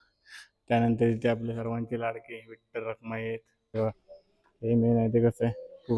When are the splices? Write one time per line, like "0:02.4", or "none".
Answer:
0:03.8